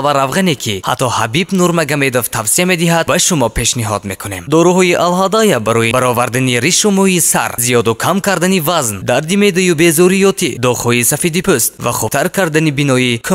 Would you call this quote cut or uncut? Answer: uncut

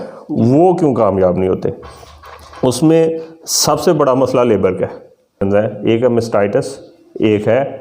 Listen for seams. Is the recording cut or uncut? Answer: cut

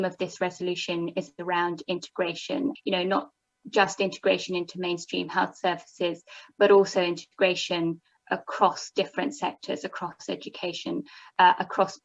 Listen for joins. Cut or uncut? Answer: cut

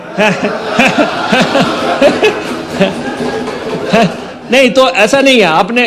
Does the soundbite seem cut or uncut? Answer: uncut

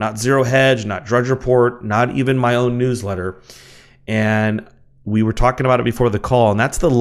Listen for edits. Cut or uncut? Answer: cut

